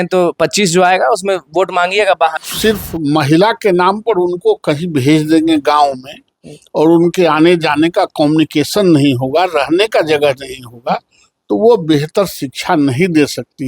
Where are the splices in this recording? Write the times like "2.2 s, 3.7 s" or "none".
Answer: 2.4 s